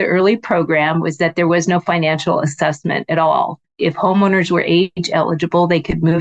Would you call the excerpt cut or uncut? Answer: cut